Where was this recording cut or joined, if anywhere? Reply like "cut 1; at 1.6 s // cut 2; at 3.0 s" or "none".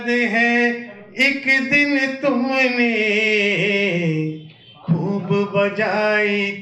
none